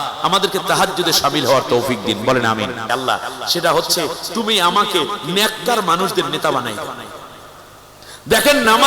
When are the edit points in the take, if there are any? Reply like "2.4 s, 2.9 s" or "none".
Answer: 2.9 s